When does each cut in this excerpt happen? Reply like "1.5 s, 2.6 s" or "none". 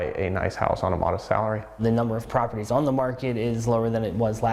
1.8 s